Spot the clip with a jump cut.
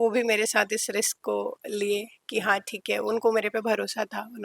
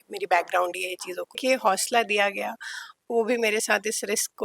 second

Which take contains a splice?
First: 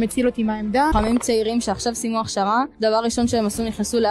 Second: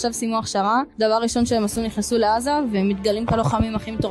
first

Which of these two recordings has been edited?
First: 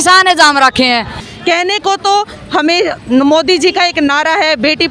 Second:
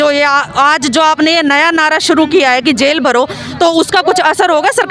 first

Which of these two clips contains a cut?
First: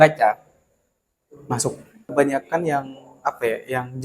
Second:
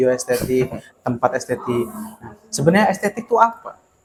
first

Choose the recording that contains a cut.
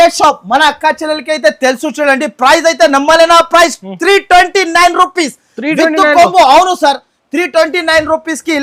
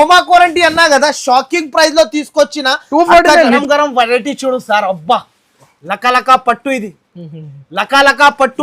second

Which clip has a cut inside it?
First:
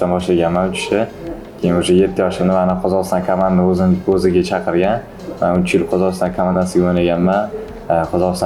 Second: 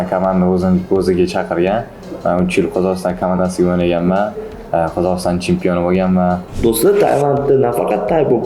second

